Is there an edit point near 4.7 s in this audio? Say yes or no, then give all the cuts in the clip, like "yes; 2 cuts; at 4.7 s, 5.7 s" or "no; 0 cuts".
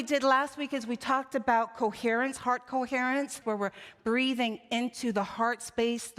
no; 1 cut; at 3.4 s